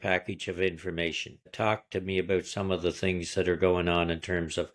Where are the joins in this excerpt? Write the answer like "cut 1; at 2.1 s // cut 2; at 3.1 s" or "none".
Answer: cut 1; at 1.5 s